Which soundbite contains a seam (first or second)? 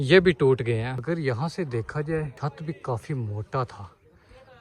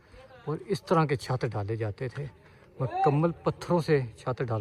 first